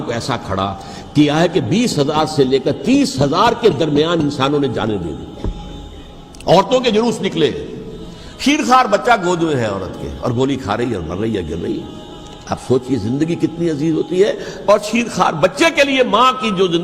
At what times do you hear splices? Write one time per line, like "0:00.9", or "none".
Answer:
none